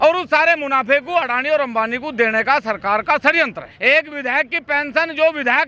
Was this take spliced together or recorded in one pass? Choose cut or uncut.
cut